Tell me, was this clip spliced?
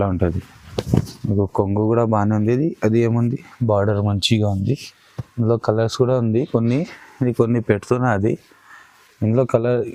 no; 0 cuts

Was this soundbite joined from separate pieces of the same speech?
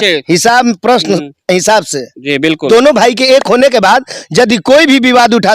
yes; 1 cut; at 2.7 s

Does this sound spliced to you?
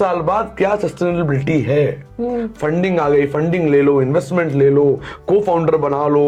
no; 0 cuts

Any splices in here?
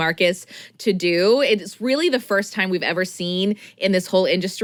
no; 0 cuts

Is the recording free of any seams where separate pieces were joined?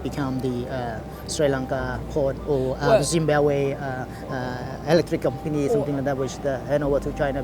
yes; 0 cuts

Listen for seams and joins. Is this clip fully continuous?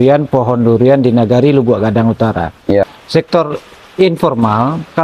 no; 1 cut; at 3.0 s

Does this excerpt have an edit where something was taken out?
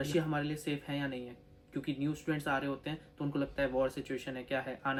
no; 0 cuts

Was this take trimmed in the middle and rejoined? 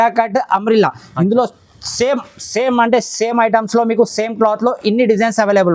no; 0 cuts

